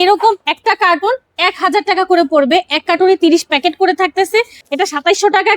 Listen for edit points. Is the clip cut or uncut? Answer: cut